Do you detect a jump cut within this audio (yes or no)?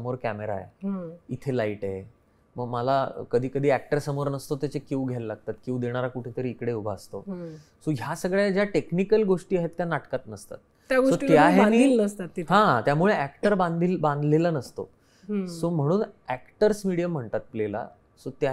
no